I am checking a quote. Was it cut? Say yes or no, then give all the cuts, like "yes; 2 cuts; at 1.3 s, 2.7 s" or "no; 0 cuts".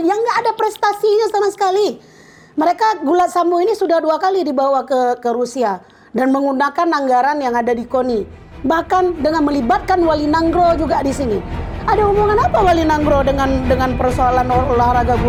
no; 0 cuts